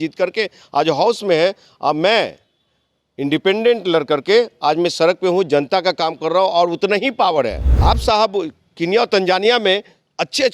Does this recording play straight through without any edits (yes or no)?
no